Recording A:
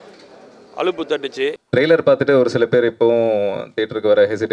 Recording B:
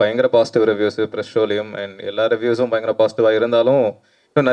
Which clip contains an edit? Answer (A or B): A